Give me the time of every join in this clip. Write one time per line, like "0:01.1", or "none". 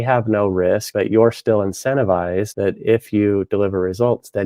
0:00.9
0:02.5